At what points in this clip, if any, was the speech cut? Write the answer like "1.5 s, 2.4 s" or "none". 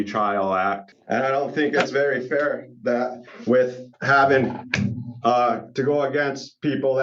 0.9 s